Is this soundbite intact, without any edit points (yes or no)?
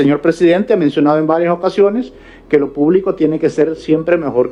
yes